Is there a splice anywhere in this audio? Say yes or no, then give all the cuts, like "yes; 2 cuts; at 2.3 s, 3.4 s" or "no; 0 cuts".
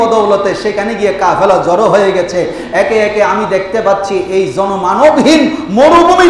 no; 0 cuts